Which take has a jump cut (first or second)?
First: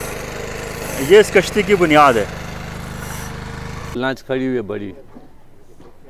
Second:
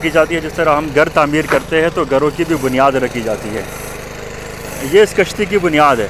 first